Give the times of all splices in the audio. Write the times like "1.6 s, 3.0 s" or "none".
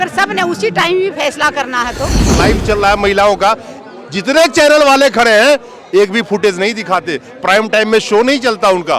2.3 s